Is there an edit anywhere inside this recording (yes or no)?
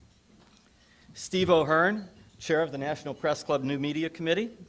no